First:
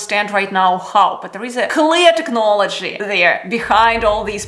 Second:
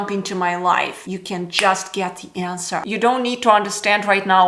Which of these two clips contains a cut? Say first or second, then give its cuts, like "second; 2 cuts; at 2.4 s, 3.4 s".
second; 2 cuts; at 1.0 s, 2.8 s